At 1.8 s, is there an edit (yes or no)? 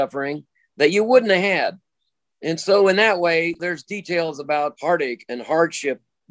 no